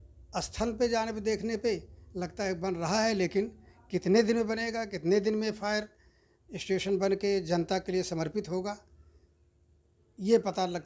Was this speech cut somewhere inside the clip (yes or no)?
no